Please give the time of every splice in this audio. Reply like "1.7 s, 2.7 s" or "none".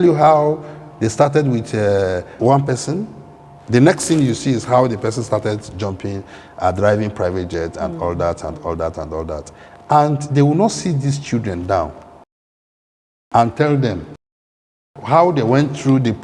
2.3 s